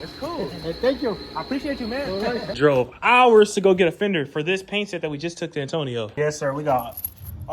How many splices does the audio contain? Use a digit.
2